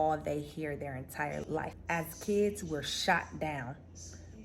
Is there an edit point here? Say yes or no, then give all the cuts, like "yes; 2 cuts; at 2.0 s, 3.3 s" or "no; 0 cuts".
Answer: yes; 1 cut; at 1.7 s